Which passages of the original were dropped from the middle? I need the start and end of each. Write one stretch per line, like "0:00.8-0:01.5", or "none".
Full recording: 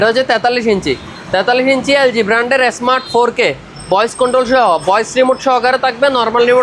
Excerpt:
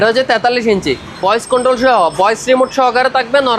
0:01.1-0:03.8